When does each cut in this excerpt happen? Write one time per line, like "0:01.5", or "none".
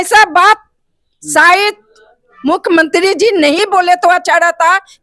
none